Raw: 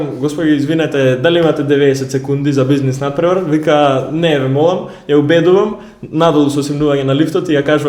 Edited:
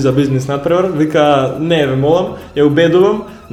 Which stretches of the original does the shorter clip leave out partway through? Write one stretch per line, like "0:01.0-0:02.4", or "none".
none